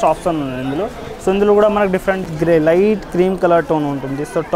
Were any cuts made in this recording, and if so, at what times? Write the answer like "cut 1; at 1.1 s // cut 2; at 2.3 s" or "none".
cut 1; at 2.3 s